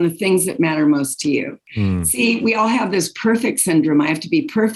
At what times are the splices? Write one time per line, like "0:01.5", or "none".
0:01.6